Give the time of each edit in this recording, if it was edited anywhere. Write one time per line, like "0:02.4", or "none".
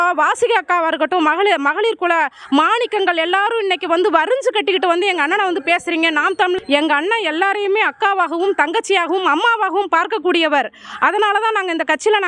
0:06.6